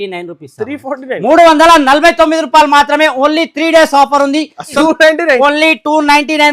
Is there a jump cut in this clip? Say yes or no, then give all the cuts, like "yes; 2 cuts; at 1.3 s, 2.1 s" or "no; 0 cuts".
yes; 1 cut; at 4.7 s